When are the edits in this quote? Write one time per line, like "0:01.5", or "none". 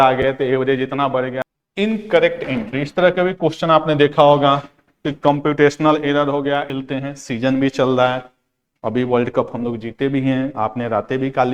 0:01.3
0:06.7